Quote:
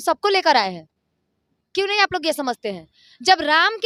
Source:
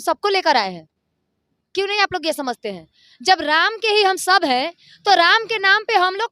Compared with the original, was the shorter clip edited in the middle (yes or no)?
no